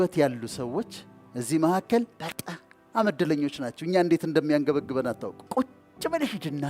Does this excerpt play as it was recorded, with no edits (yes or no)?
no